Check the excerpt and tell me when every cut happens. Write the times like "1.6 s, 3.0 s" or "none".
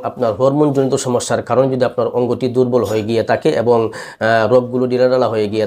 none